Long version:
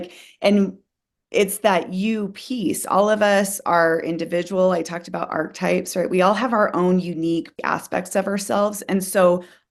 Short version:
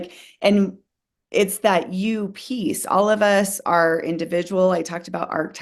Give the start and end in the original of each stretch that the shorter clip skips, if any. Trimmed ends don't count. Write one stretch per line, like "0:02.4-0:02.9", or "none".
none